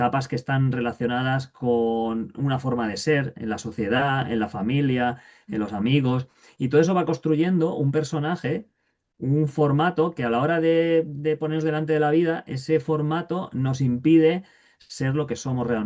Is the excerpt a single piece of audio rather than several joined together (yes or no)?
yes